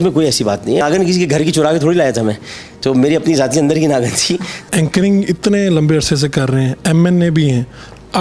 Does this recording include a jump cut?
yes; 2 cuts; at 0.8 s, 4.7 s

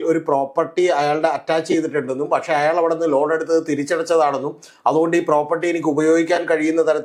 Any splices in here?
no; 0 cuts

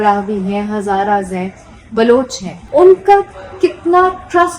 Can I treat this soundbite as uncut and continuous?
no; 1 cut; at 2.6 s

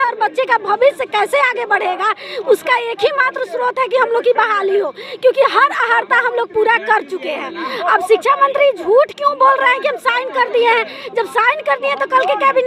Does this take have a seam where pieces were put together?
no; 0 cuts

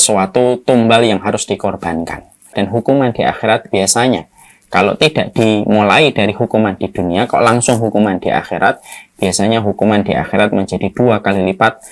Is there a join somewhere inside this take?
yes; 1 cut; at 2.5 s

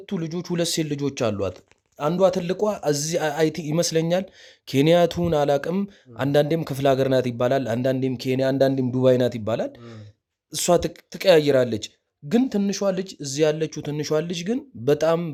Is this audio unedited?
yes; 0 cuts

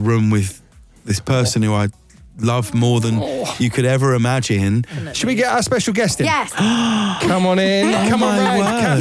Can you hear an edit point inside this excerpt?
yes; 2 cuts; at 5.0 s, 6.5 s

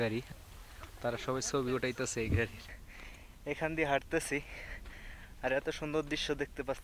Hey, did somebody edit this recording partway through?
yes; 1 cut; at 2.6 s

